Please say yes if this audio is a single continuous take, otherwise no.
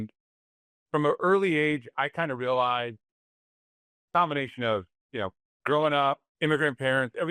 no